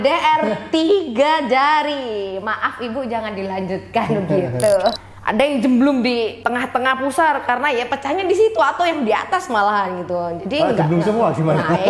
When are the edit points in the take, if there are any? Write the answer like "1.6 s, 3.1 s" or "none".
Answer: 5.0 s, 6.4 s

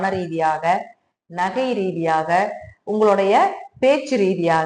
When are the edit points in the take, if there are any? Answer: none

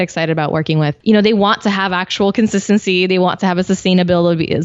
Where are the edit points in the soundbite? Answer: 1.0 s

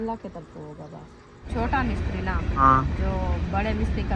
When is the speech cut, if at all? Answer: 1.4 s, 2.6 s

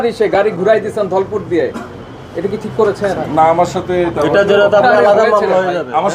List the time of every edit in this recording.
none

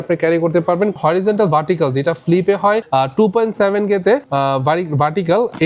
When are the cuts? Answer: 1.0 s, 2.8 s, 4.3 s

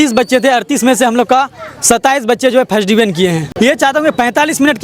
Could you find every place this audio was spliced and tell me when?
3.5 s

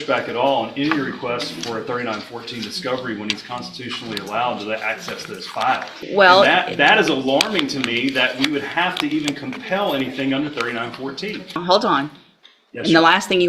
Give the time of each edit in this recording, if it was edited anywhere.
5.9 s, 11.6 s

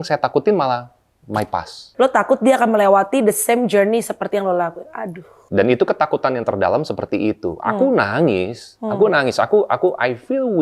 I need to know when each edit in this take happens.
1.9 s, 5.4 s

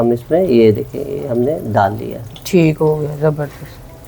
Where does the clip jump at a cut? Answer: none

